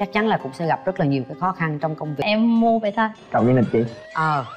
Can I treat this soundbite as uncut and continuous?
no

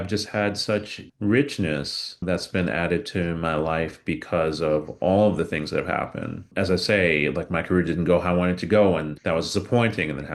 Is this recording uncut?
no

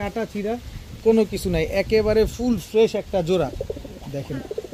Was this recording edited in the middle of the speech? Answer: no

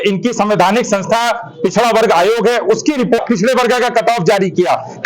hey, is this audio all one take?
no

